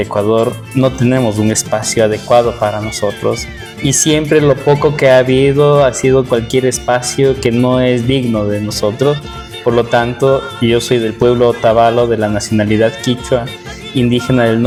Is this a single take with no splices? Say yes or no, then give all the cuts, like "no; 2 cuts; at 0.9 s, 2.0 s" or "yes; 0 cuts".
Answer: yes; 0 cuts